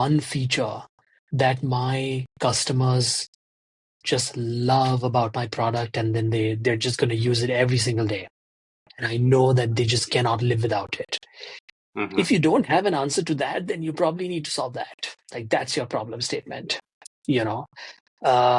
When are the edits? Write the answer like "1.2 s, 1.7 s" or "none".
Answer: none